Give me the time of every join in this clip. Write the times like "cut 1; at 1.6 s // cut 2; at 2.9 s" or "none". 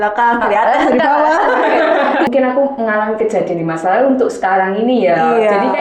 cut 1; at 2.3 s